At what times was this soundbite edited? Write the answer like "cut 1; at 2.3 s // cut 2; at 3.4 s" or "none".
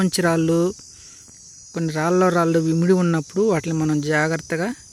none